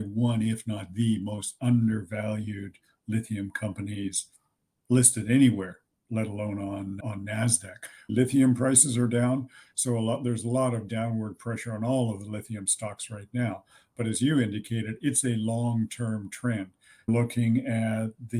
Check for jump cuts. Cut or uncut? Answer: cut